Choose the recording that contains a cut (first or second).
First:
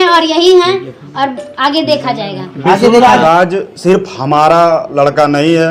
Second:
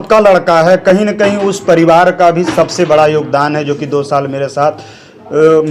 first